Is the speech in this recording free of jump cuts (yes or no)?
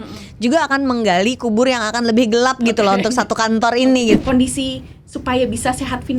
no